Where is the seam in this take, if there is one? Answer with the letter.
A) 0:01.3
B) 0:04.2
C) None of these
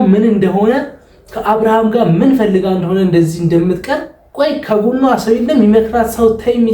B